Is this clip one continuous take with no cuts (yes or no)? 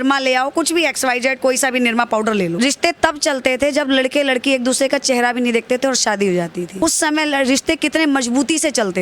no